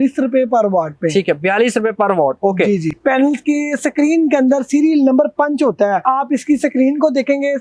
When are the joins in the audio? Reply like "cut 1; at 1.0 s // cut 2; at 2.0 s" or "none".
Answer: cut 1; at 2.9 s // cut 2; at 6.0 s